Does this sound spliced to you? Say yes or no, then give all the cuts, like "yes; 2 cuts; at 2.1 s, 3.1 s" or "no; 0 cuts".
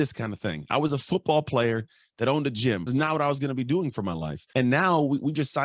yes; 2 cuts; at 2.9 s, 4.3 s